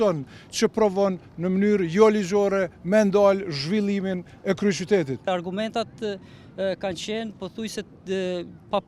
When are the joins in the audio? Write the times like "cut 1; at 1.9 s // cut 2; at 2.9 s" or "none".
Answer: cut 1; at 5.3 s